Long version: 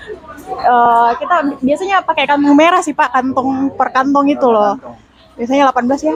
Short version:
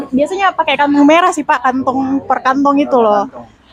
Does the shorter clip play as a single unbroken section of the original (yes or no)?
yes